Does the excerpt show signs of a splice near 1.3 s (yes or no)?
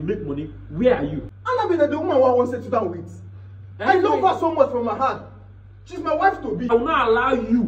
yes